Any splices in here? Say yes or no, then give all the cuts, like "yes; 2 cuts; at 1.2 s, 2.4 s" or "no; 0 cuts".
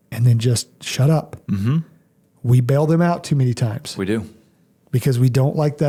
no; 0 cuts